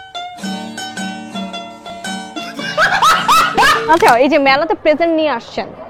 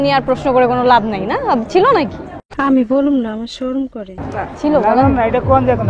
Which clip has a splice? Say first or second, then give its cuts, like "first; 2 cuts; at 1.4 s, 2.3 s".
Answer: first; 1 cut; at 3.8 s